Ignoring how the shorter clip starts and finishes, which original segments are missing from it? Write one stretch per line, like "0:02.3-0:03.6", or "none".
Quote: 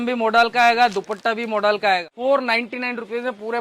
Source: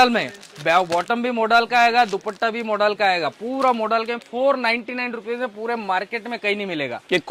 0:03.3-0:04.3